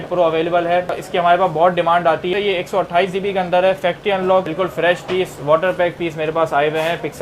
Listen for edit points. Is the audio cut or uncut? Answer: cut